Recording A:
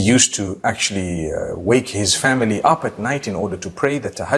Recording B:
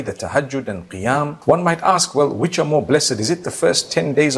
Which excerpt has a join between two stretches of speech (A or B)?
B